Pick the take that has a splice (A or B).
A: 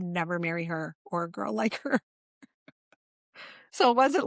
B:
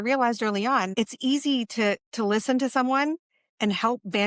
B